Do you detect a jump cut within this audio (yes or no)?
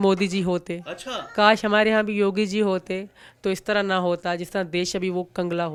no